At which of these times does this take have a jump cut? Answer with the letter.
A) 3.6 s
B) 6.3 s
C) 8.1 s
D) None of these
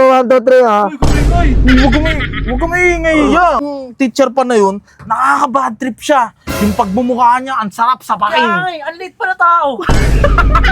A